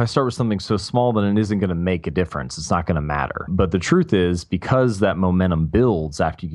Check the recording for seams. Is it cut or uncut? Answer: cut